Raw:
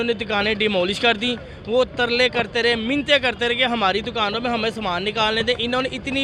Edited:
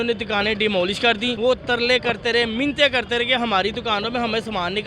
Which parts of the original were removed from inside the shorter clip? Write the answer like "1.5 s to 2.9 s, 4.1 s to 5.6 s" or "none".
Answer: 1.4 s to 1.6 s